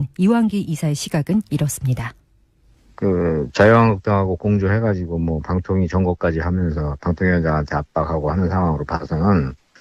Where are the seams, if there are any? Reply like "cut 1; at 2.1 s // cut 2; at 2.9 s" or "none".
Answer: none